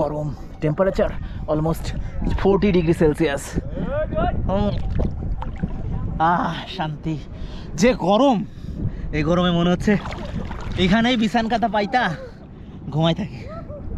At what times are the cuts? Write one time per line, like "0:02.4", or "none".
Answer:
0:06.1